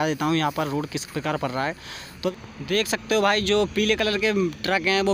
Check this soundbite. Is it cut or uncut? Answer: cut